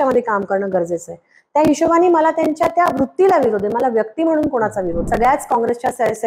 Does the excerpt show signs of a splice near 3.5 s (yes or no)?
no